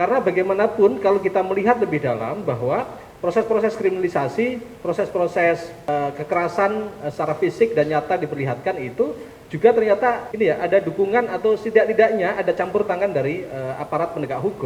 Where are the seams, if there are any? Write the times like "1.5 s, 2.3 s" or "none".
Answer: 5.9 s, 10.3 s